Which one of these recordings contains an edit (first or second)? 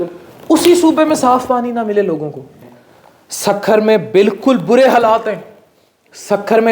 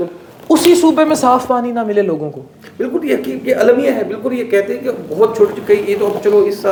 first